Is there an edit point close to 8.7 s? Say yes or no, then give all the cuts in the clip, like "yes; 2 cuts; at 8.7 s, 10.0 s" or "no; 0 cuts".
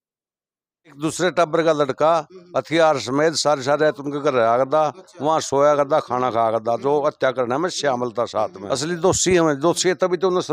yes; 2 cuts; at 1.0 s, 8.7 s